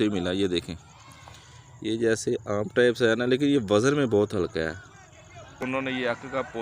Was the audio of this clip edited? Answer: yes; 1 cut; at 5.6 s

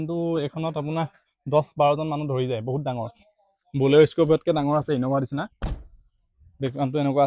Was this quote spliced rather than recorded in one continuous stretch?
no; 0 cuts

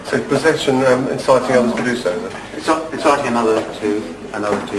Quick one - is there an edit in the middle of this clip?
no; 0 cuts

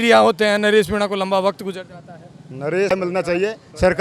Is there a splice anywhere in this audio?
yes; 1 cut; at 2.9 s

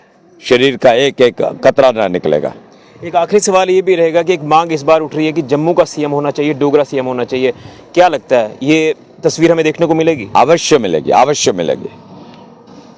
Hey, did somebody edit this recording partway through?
no; 0 cuts

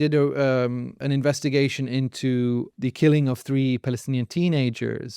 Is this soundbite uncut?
no; 2 cuts; at 0.9 s, 2.7 s

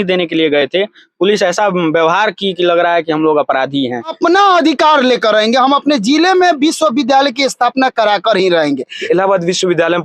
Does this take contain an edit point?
yes; 2 cuts; at 4.1 s, 9.0 s

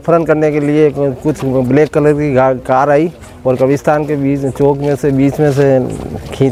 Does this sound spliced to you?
no; 0 cuts

